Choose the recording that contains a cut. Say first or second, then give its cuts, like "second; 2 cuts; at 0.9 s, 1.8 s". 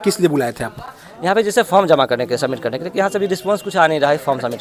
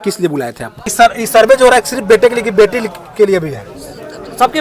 second; 1 cut; at 0.9 s